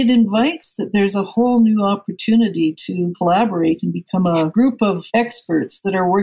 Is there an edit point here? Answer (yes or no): yes